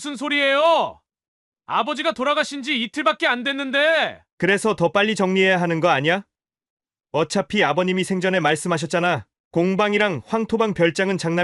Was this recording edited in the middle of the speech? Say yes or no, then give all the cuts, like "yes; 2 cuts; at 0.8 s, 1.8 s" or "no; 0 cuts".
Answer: no; 0 cuts